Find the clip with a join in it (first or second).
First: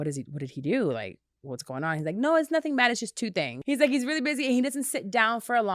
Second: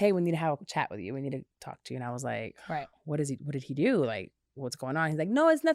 first